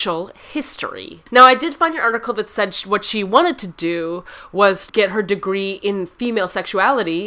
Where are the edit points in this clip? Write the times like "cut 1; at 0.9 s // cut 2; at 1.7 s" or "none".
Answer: cut 1; at 1.2 s // cut 2; at 4.8 s